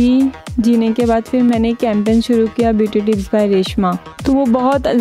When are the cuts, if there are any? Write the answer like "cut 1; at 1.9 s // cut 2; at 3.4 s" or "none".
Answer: cut 1; at 4.1 s